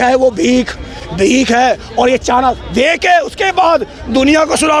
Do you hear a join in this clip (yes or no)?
no